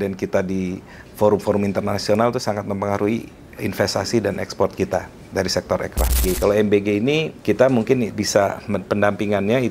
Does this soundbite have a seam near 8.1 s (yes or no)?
yes